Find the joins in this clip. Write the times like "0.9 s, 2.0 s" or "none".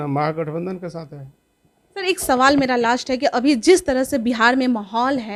none